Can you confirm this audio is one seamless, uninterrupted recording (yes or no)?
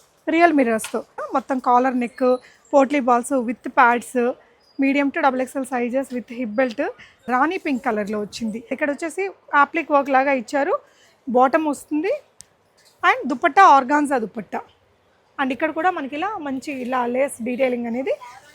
no